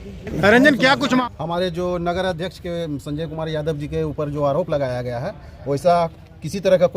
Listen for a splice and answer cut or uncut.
cut